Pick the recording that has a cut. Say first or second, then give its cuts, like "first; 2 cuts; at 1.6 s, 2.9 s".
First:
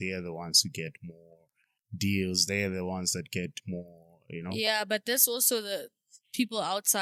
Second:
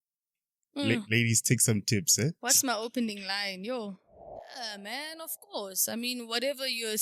second; 1 cut; at 4.5 s